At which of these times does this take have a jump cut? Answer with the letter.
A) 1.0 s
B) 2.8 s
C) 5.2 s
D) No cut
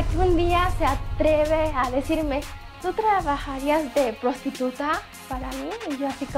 D